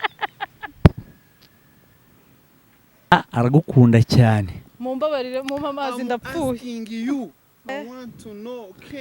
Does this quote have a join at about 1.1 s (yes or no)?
no